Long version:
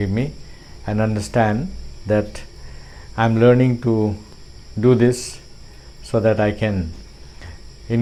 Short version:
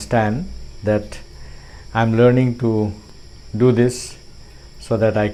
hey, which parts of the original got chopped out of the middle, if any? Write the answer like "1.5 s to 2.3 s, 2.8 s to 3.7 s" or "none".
none